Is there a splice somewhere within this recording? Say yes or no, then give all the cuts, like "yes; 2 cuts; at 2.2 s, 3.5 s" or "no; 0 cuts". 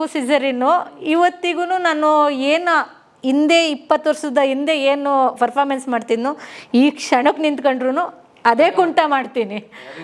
no; 0 cuts